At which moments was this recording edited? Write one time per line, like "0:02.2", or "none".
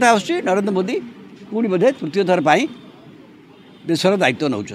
none